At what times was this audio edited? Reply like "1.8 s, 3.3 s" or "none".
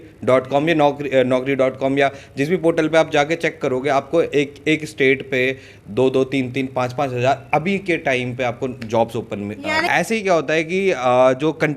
9.9 s

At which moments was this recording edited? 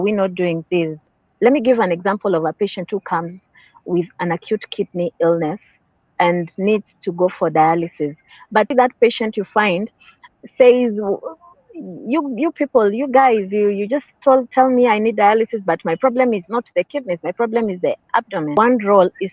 1.1 s, 8.7 s, 18.6 s

